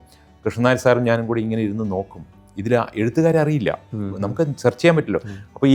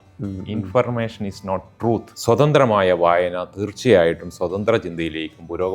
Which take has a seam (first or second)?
second